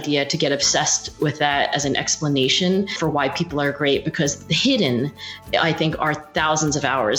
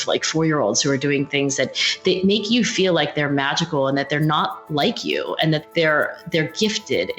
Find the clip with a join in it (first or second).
second